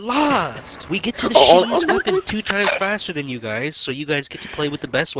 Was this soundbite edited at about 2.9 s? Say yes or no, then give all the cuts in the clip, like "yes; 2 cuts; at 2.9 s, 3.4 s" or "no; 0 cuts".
no; 0 cuts